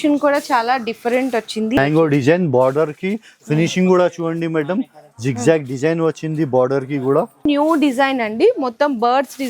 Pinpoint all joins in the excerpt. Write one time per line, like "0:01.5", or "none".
0:01.8
0:07.5